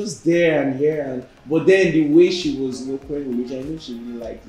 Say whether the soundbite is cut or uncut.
uncut